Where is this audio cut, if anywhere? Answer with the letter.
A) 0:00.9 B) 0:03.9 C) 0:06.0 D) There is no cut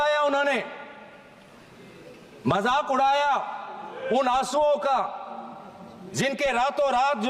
D